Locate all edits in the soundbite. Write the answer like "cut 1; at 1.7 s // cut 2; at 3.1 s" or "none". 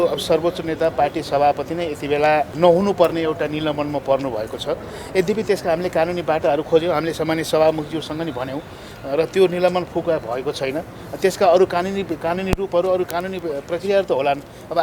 cut 1; at 2.5 s